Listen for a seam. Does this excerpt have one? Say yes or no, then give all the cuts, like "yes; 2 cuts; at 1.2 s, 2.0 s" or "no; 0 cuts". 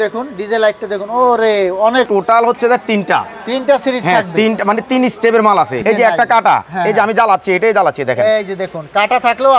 yes; 2 cuts; at 2.1 s, 5.8 s